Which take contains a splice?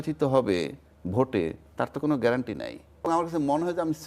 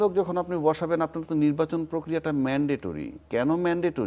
first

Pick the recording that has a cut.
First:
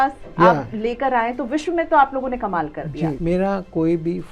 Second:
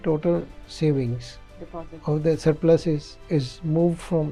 first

